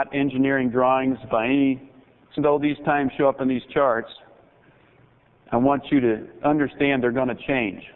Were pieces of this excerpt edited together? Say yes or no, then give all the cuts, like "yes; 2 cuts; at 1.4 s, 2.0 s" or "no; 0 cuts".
no; 0 cuts